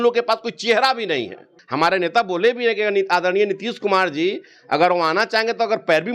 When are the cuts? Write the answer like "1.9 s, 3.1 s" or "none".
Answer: 1.6 s